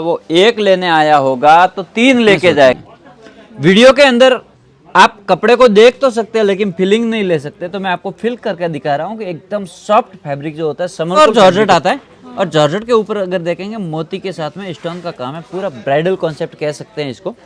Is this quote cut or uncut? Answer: cut